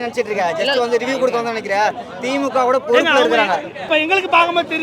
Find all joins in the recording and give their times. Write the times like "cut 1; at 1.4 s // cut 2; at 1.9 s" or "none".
cut 1; at 3.9 s